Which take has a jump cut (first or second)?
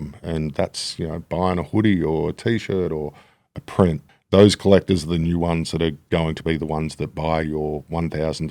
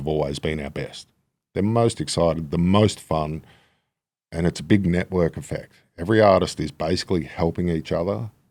first